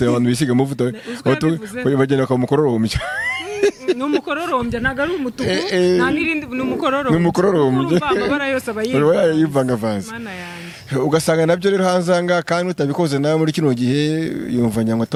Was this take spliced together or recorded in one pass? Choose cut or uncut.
uncut